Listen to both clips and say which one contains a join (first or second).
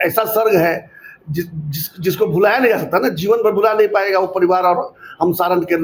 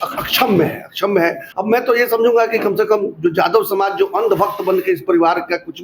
second